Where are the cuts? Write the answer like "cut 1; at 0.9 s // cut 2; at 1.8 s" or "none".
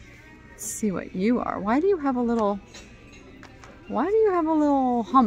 none